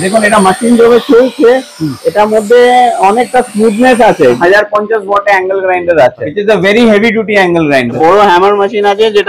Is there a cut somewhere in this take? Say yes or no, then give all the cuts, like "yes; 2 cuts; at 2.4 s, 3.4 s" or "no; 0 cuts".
yes; 3 cuts; at 4.4 s, 6.3 s, 8.0 s